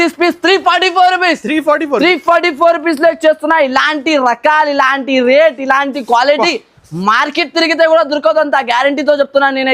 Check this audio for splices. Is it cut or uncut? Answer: uncut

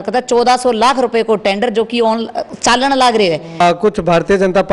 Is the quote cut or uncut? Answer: cut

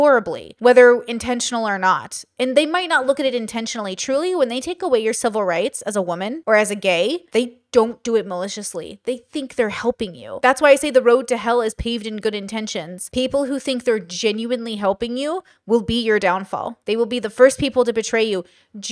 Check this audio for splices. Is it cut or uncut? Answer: uncut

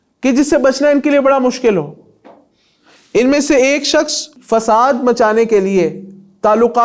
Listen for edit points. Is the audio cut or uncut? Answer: cut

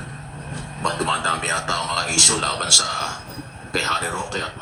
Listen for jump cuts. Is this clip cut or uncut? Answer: uncut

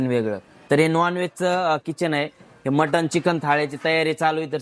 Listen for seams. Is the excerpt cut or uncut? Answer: uncut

